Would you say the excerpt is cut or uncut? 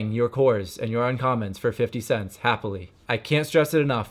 cut